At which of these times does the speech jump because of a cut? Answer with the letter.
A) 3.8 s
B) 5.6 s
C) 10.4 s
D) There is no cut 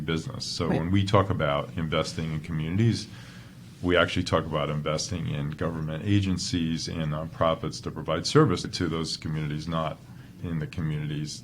C